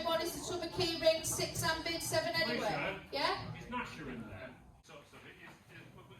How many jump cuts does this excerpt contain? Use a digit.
1